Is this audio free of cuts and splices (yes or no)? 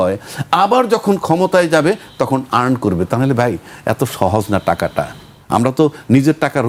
yes